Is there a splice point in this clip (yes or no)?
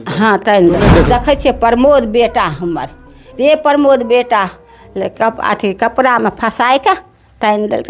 yes